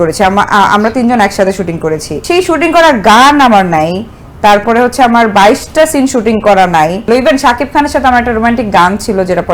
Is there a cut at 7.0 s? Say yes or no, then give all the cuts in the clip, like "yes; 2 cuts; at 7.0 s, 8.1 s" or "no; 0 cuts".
yes; 2 cuts; at 2.1 s, 7.0 s